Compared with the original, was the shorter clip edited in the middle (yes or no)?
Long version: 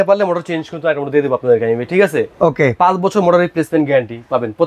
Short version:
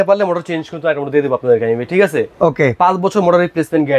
no